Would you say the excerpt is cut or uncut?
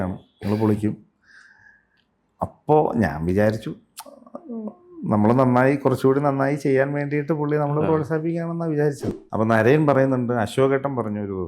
cut